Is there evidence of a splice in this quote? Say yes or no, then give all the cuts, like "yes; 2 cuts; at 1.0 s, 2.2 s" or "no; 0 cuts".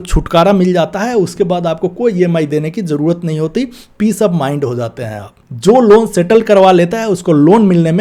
yes; 1 cut; at 5.3 s